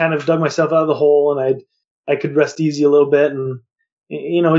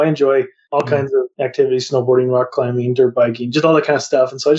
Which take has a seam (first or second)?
second